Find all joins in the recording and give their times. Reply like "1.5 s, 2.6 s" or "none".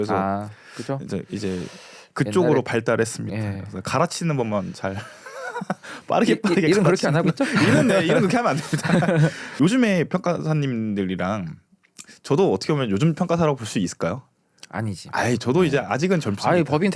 9.4 s